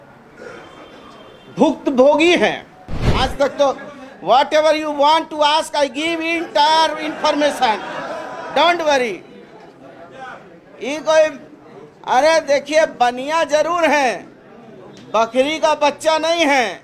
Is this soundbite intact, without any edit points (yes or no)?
no